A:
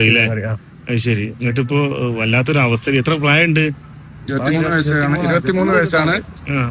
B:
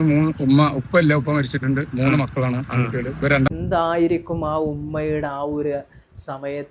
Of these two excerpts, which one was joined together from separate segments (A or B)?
B